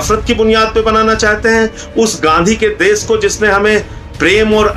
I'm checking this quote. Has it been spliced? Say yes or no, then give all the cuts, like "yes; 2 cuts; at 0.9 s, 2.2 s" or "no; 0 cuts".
no; 0 cuts